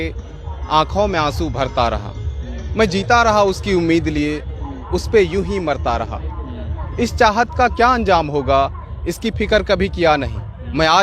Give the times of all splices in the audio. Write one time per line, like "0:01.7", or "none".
none